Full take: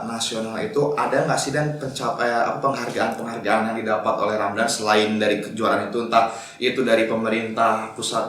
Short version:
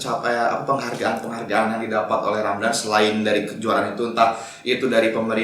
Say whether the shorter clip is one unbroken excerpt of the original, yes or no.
yes